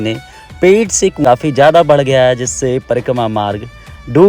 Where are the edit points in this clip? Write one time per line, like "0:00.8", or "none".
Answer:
0:01.2